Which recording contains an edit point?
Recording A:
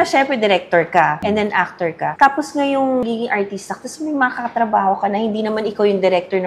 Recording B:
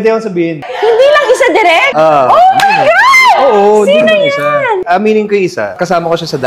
B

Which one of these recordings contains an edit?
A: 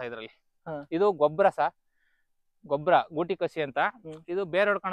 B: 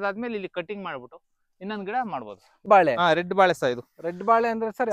B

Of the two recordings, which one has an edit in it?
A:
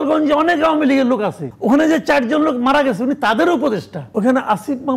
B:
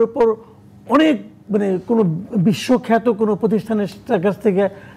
A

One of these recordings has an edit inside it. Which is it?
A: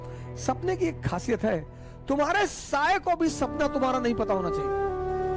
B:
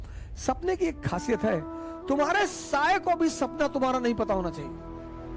A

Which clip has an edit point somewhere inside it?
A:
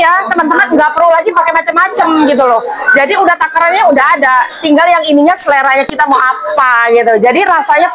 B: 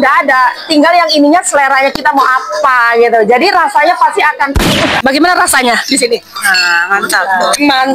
B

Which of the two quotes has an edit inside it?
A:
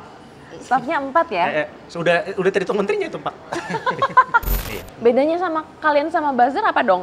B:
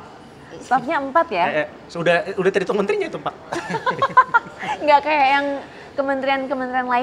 A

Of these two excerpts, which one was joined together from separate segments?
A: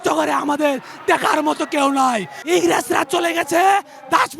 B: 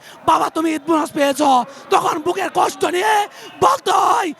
A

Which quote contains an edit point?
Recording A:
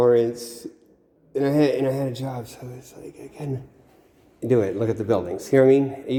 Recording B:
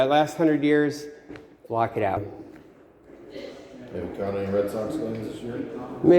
B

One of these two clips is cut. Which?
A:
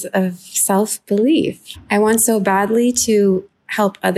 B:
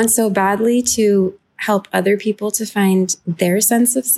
B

